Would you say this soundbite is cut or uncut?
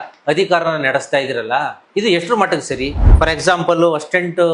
cut